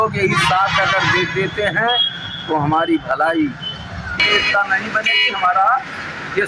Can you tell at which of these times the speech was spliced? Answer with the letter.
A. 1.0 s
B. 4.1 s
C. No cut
B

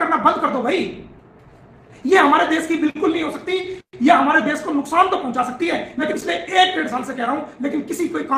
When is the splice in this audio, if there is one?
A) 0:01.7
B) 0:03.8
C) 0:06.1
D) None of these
C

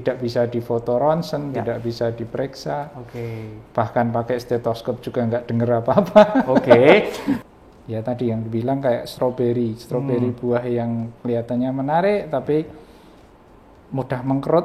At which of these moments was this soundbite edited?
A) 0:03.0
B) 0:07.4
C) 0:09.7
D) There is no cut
B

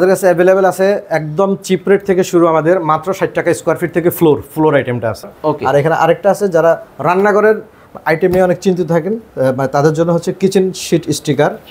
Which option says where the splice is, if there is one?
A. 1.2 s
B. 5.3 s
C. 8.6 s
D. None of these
B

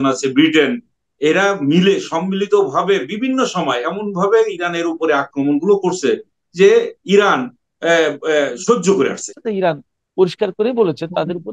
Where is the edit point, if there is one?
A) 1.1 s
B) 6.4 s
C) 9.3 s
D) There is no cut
C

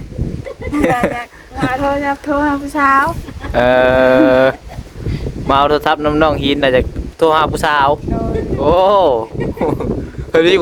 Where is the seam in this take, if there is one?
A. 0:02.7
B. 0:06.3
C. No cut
C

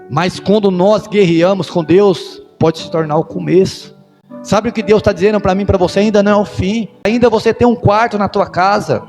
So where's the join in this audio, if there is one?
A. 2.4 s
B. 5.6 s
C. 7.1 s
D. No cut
C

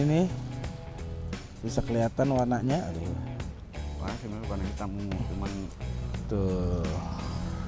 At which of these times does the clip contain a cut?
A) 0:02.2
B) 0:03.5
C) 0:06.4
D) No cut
D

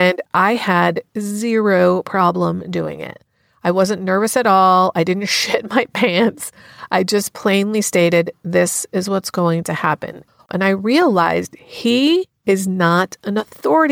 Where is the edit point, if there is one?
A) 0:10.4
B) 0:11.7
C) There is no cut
A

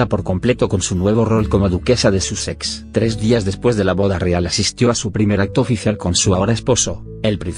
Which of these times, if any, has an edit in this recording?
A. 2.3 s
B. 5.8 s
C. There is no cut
A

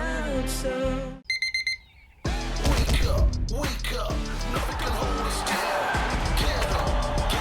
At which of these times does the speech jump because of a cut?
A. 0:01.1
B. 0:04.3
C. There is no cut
A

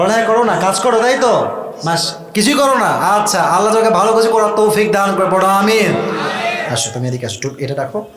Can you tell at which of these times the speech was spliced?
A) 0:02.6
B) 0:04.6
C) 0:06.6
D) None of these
C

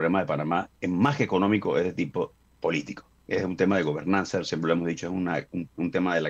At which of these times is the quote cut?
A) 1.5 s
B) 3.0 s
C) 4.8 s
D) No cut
B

